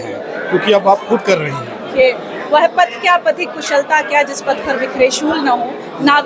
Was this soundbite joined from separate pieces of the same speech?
yes; 1 cut; at 1.9 s

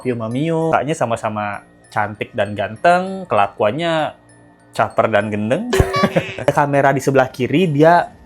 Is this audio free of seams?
no; 2 cuts; at 0.7 s, 6.5 s

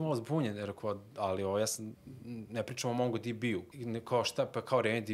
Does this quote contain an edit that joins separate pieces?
yes; 1 cut; at 3.7 s

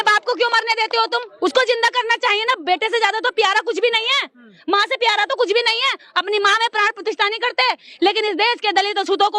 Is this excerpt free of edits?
no; 1 cut; at 1.3 s

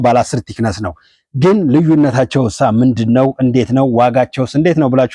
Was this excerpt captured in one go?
yes; 0 cuts

